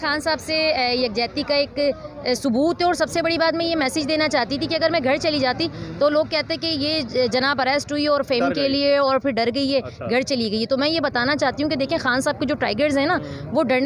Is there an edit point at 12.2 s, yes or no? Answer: no